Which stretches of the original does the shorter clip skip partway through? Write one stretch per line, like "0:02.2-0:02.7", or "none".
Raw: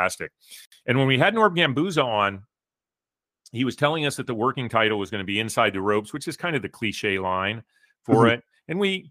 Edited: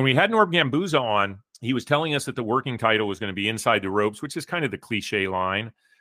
0:02.5-0:03.4